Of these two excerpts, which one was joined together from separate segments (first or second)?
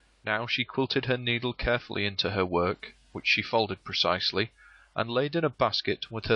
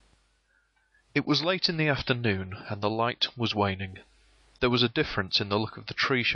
first